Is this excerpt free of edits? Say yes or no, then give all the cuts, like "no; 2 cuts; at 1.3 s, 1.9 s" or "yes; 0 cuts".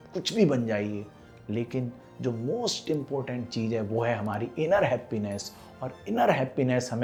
yes; 0 cuts